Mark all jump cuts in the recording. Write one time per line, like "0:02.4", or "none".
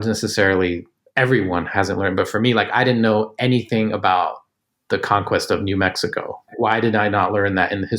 0:06.4